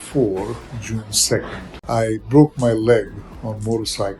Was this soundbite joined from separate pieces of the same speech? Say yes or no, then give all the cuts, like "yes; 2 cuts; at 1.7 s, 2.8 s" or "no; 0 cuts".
yes; 1 cut; at 1.7 s